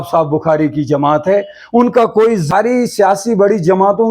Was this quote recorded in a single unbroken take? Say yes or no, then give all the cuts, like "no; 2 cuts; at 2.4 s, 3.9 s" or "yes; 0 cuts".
no; 1 cut; at 2.5 s